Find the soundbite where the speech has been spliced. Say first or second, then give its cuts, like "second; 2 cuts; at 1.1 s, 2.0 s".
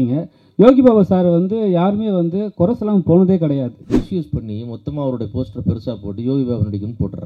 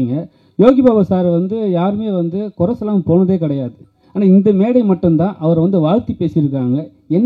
first; 1 cut; at 4.0 s